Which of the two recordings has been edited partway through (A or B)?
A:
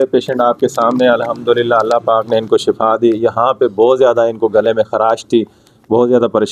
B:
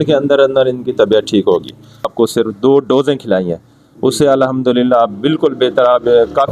B